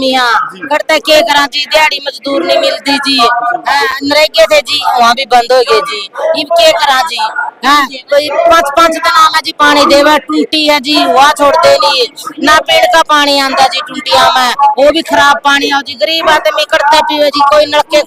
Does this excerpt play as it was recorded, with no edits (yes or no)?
yes